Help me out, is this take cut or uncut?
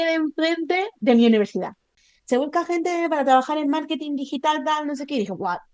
cut